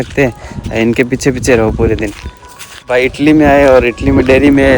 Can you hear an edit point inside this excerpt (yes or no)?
yes